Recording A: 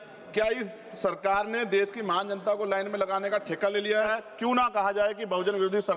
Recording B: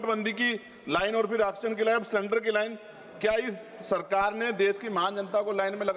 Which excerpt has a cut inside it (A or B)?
A